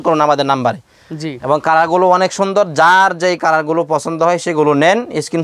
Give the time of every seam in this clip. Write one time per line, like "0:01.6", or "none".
none